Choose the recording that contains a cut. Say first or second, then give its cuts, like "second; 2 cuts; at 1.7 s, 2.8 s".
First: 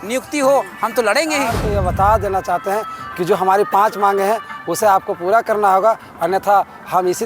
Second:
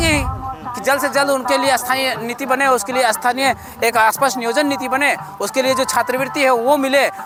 first; 1 cut; at 1.6 s